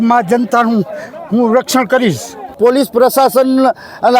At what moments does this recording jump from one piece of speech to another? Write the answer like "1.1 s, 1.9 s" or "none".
2.5 s